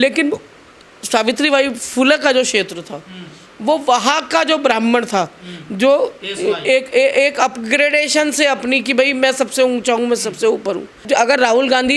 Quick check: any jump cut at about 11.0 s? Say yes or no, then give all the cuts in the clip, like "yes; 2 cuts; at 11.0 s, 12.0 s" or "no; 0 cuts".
yes; 1 cut; at 11.0 s